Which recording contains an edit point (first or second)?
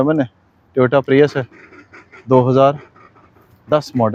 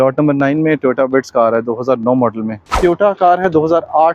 second